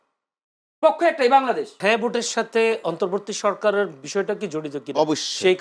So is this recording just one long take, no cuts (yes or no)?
no